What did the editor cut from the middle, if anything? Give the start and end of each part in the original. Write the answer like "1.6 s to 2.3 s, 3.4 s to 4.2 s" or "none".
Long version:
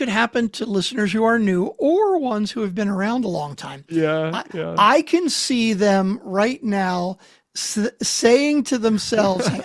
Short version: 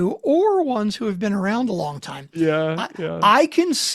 none